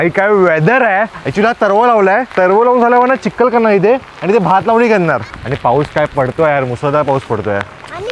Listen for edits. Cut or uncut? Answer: cut